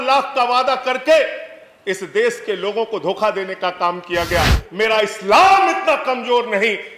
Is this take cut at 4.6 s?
yes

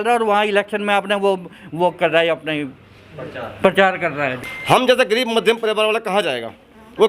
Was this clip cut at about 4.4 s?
yes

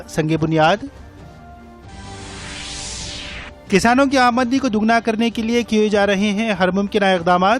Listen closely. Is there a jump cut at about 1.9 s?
yes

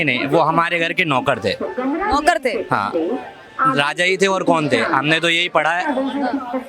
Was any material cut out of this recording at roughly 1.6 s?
no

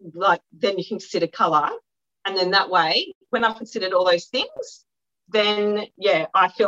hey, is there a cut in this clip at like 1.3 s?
no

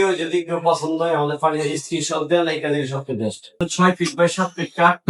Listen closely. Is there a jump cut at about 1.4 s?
no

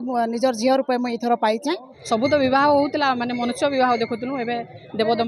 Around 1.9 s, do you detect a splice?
yes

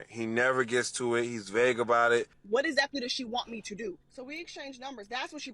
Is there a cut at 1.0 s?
no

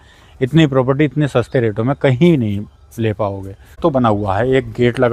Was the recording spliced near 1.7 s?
no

